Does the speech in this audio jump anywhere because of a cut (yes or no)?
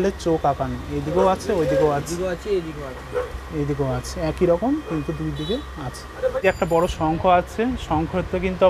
no